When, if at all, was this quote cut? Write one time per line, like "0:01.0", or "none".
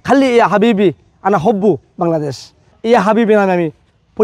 0:02.7